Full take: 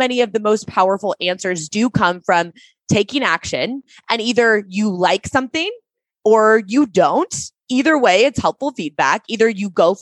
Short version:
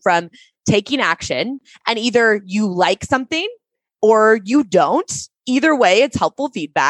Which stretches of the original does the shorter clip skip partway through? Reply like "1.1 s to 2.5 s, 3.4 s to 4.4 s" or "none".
none